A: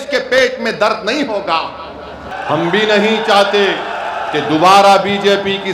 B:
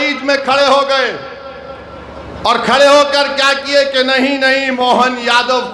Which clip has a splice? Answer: A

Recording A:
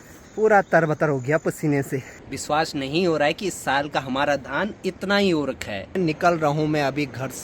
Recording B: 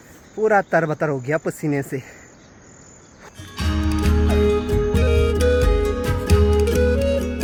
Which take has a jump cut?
A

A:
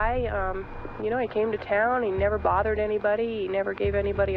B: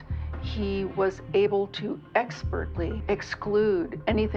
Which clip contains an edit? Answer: B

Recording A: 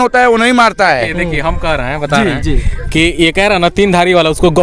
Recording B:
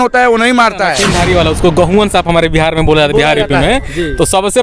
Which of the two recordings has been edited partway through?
B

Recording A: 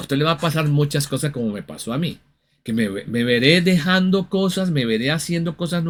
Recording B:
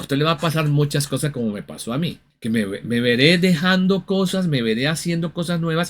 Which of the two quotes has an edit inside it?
B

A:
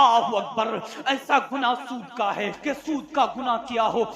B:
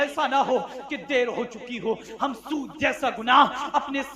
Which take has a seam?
A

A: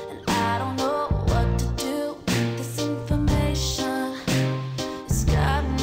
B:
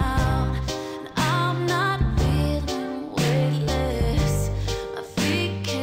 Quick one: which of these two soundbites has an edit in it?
A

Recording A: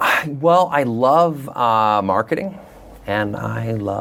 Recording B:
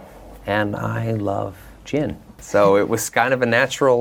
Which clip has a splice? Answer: B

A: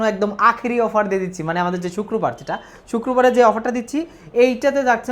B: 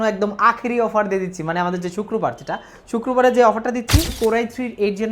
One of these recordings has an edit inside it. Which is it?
B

